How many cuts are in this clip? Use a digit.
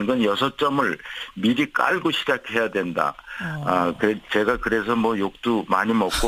0